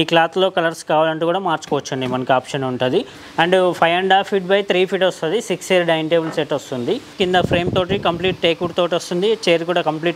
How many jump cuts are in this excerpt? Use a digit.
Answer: 2